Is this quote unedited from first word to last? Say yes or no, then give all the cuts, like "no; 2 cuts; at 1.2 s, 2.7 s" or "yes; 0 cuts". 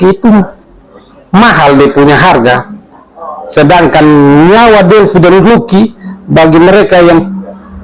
yes; 0 cuts